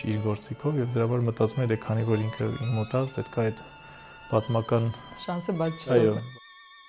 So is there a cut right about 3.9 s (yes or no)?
no